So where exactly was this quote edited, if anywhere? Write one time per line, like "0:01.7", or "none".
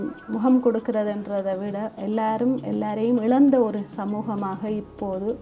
none